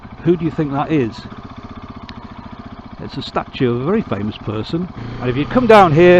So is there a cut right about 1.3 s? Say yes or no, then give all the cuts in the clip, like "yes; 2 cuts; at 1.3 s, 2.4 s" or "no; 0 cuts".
no; 1 cut; at 5.0 s